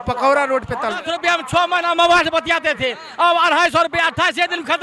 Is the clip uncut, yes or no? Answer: no